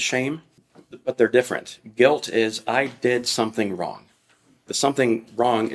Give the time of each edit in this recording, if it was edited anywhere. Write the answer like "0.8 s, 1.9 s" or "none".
4.7 s